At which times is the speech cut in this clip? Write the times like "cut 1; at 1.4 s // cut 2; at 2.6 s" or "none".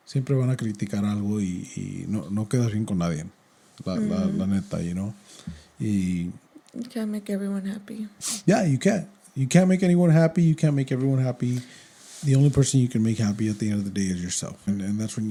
none